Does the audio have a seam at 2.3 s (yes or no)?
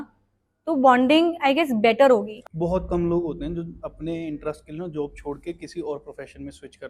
yes